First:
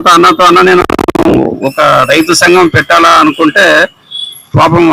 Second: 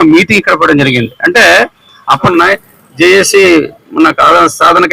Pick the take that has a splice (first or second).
second